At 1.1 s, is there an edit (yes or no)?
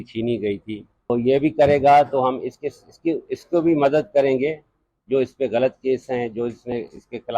yes